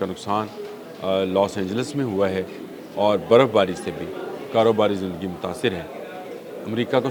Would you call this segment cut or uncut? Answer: uncut